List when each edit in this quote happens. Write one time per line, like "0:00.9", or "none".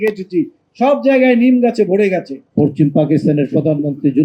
0:02.4